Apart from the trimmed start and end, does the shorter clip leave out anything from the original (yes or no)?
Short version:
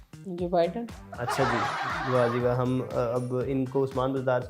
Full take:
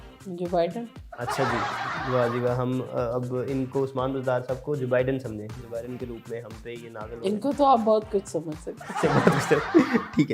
no